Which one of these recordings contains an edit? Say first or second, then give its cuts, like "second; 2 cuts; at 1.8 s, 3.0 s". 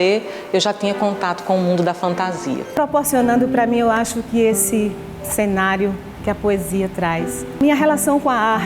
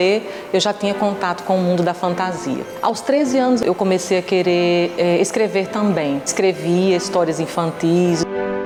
first; 2 cuts; at 2.8 s, 7.6 s